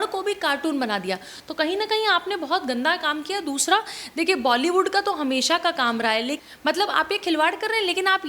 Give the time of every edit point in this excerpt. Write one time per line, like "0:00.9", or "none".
0:06.4